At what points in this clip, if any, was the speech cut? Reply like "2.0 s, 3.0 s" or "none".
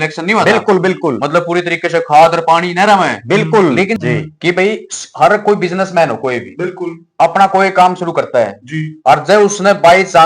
4.0 s